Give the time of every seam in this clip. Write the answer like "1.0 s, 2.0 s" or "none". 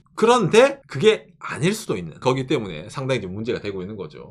0.9 s, 2.2 s